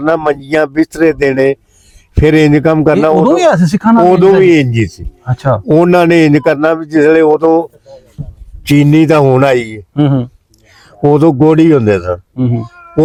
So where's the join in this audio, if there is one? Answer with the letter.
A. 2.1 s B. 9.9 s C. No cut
C